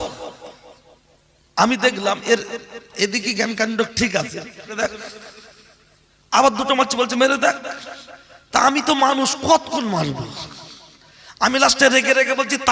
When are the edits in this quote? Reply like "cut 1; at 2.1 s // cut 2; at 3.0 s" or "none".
cut 1; at 4.7 s